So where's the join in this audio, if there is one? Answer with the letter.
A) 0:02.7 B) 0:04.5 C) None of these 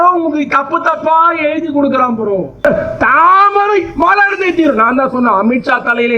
A